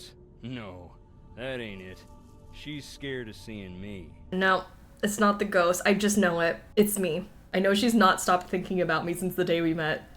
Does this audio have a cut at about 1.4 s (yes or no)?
no